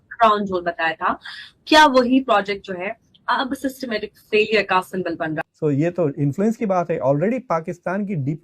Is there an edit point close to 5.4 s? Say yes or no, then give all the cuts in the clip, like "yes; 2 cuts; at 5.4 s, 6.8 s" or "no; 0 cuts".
yes; 1 cut; at 5.4 s